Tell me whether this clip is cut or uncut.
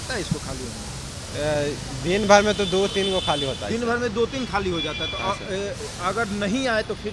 uncut